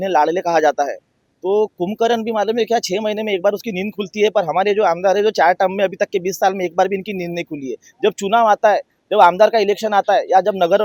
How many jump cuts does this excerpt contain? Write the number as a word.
zero